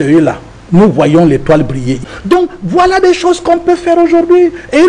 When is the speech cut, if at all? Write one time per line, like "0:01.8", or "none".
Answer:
0:01.9